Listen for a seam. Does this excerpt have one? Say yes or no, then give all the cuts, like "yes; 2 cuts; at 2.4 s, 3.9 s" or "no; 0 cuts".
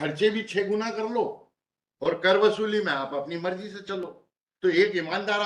no; 0 cuts